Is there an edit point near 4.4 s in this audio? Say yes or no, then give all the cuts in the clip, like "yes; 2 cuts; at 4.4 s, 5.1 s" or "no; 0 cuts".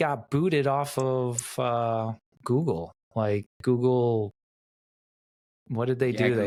no; 0 cuts